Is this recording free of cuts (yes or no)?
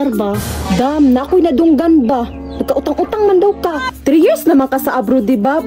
no